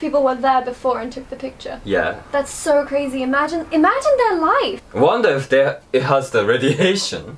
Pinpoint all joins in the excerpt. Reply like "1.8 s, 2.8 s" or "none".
4.8 s